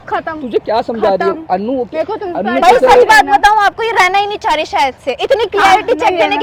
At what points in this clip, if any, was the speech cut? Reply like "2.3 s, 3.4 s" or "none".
none